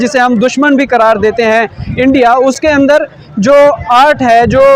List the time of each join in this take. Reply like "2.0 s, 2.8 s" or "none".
none